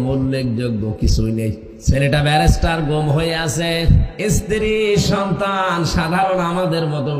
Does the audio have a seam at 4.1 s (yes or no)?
yes